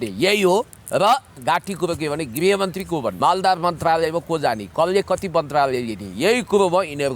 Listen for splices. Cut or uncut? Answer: cut